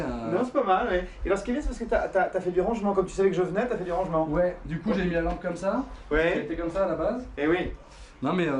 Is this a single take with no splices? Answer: no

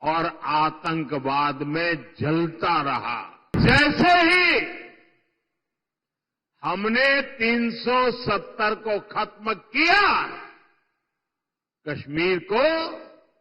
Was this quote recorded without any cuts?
no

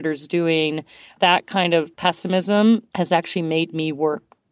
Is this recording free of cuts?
no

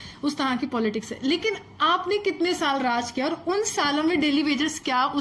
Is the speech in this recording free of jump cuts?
yes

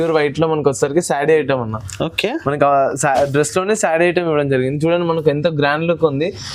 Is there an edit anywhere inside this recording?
no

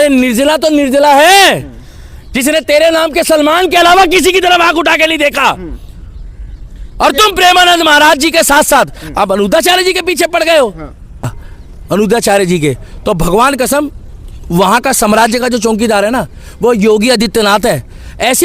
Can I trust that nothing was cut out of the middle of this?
no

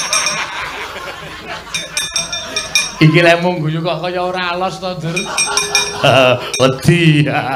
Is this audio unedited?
yes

